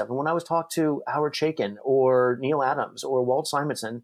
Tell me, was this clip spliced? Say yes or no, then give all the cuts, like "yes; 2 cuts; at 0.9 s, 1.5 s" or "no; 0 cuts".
no; 0 cuts